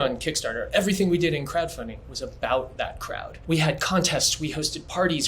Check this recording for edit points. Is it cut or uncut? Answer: cut